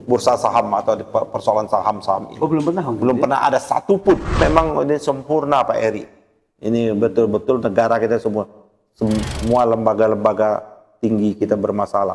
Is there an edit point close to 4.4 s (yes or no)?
yes